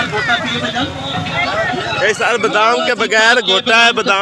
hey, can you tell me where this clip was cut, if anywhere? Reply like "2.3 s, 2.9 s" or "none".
none